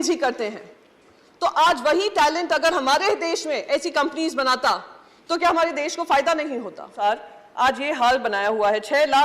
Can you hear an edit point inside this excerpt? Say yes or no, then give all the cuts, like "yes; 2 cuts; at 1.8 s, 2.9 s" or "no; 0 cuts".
yes; 1 cut; at 6.9 s